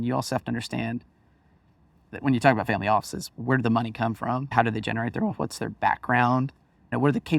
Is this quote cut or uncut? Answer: uncut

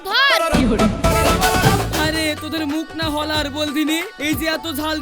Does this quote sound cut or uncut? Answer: cut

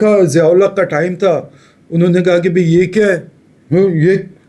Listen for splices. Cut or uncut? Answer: uncut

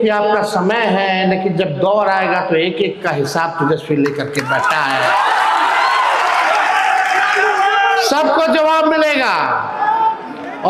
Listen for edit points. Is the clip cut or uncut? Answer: uncut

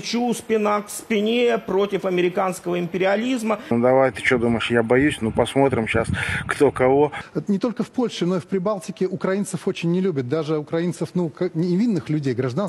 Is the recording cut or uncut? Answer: cut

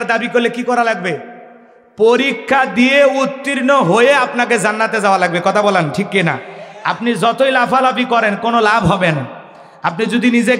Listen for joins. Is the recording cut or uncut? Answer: uncut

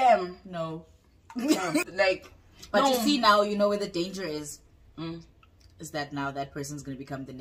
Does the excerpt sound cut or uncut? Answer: cut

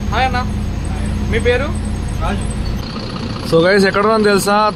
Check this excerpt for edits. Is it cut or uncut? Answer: cut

